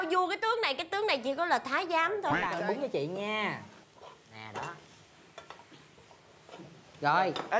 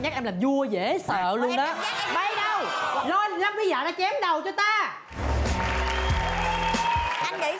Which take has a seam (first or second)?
first